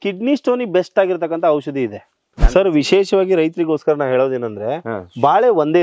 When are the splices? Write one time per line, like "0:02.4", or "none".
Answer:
0:02.4